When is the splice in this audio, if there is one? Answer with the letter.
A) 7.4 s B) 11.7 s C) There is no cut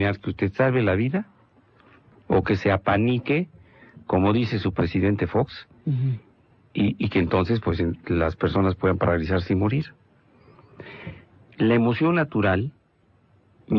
A